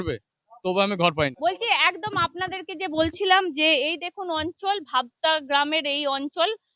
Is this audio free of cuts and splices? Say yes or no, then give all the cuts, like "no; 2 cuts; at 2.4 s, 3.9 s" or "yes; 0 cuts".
no; 1 cut; at 1.3 s